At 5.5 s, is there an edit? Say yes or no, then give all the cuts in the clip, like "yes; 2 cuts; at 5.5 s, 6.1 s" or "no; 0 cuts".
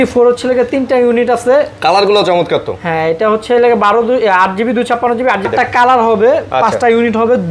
yes; 1 cut; at 5.5 s